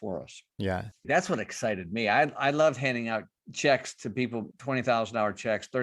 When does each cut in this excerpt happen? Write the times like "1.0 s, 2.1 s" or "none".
1.0 s, 3.4 s, 4.5 s